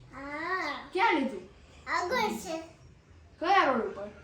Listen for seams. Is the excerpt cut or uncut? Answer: uncut